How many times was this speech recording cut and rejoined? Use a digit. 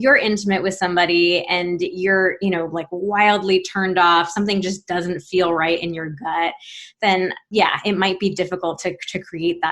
1